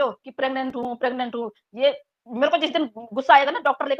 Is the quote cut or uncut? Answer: uncut